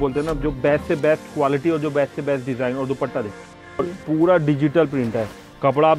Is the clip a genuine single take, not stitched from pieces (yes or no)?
no